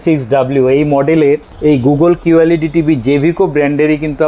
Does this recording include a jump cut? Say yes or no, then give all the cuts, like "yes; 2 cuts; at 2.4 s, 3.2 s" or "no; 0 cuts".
yes; 1 cut; at 1.5 s